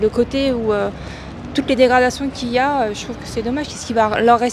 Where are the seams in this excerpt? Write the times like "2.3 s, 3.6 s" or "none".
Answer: none